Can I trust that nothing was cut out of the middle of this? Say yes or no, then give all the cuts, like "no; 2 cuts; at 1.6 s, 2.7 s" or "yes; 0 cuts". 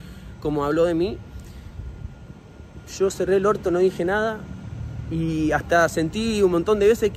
yes; 0 cuts